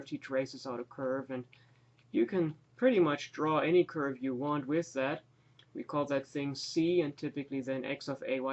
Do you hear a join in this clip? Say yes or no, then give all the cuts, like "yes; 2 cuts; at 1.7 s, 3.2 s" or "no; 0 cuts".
yes; 1 cut; at 3.3 s